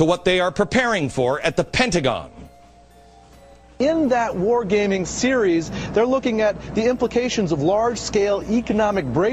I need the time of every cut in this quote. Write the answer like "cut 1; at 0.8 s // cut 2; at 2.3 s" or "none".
none